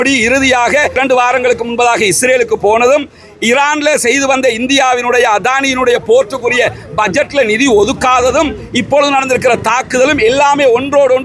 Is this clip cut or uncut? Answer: cut